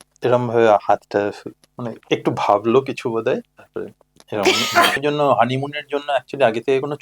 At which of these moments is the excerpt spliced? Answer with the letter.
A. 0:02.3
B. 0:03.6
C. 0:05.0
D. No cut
C